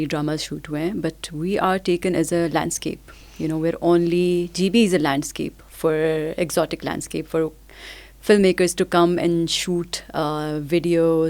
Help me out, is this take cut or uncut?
uncut